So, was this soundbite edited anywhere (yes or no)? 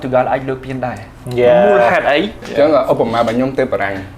yes